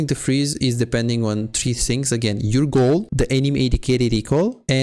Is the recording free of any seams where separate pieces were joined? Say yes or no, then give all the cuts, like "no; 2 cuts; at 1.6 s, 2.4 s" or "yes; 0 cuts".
no; 1 cut; at 3.1 s